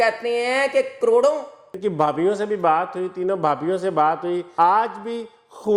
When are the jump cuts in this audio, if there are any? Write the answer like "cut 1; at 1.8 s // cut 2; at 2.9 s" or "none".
cut 1; at 1.6 s // cut 2; at 4.5 s

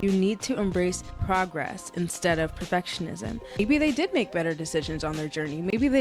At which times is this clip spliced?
cut 1; at 1.1 s // cut 2; at 3.6 s

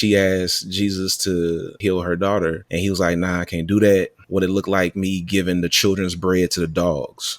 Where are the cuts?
cut 1; at 1.7 s // cut 2; at 2.7 s // cut 3; at 4.2 s

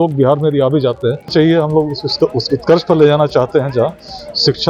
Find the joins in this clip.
cut 1; at 1.3 s

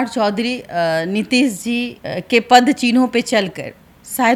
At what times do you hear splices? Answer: none

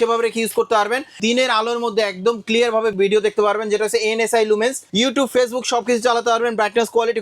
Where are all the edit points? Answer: cut 1; at 1.1 s // cut 2; at 2.9 s // cut 3; at 4.8 s

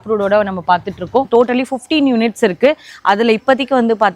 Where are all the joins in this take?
cut 1; at 1.3 s

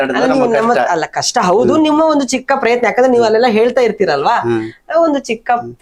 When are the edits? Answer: none

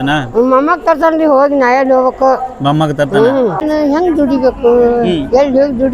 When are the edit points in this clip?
cut 1; at 3.6 s

